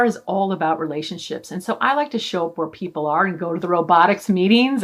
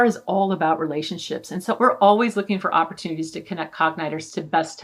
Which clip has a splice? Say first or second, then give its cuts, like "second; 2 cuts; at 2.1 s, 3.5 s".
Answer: second; 1 cut; at 1.8 s